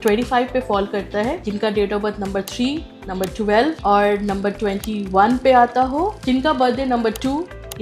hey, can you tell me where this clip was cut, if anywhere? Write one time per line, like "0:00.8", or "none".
0:01.4
0:03.8
0:06.2